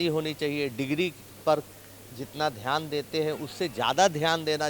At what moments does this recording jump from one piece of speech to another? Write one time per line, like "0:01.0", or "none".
none